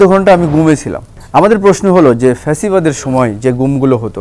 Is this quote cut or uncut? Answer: cut